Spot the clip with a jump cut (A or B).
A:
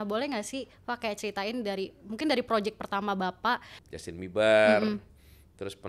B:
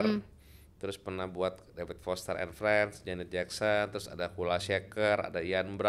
A